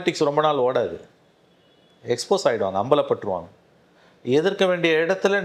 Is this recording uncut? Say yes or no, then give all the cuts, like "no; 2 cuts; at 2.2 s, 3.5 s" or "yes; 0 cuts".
yes; 0 cuts